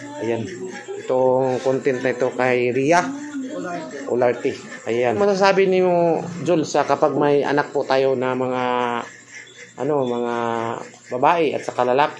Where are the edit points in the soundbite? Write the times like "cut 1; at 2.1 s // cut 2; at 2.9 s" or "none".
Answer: cut 1; at 5.2 s